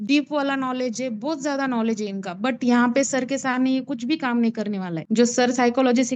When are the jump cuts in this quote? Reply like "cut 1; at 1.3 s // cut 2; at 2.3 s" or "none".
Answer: none